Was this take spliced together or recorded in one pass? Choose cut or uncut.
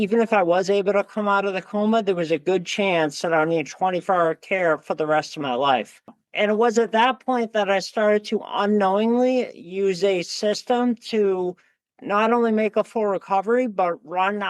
cut